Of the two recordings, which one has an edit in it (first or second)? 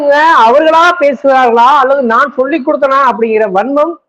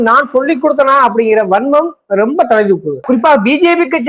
second